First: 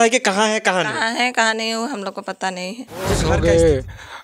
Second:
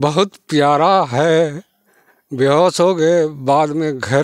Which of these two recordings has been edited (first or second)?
first